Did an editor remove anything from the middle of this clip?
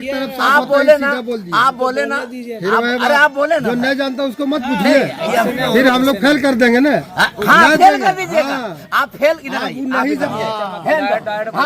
yes; 1 cut; at 10.3 s

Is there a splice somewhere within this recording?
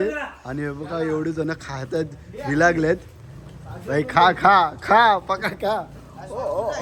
no; 0 cuts

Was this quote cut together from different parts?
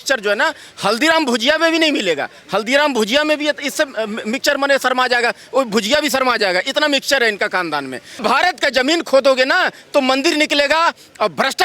yes; 1 cut; at 8.2 s

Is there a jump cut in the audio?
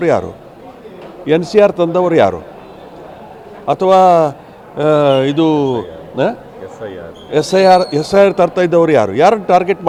no; 0 cuts

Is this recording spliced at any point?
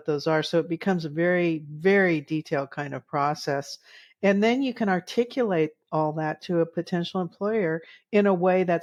no; 0 cuts

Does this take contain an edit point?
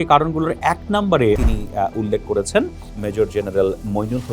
yes; 1 cut; at 1.4 s

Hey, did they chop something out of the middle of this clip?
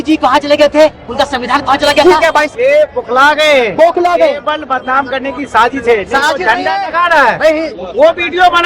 yes; 1 cut; at 2.5 s

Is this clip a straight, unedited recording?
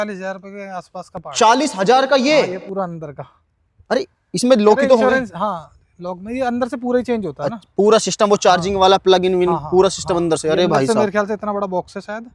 yes; 0 cuts

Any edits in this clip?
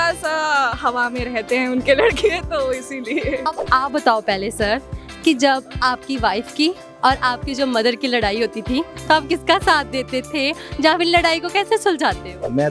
yes; 1 cut; at 3.4 s

